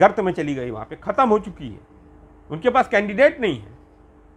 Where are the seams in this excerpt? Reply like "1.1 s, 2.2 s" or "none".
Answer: none